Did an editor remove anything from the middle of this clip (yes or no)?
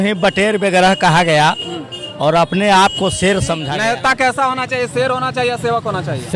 yes